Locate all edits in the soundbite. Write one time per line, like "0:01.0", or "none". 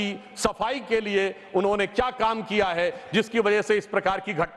none